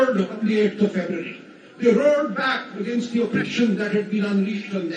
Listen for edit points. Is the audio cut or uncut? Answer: uncut